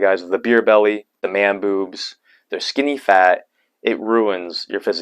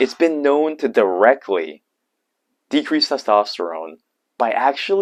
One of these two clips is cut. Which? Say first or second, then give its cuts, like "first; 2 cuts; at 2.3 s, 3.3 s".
first; 1 cut; at 1.1 s